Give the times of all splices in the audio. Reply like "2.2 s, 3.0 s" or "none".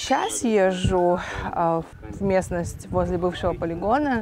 2.0 s